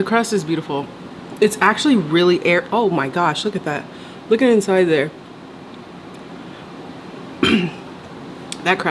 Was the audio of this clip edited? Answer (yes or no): no